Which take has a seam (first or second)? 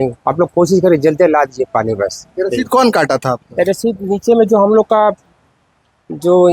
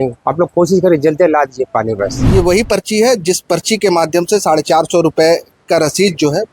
second